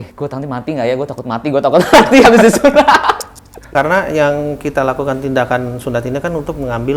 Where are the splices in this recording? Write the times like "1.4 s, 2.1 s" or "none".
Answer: 3.7 s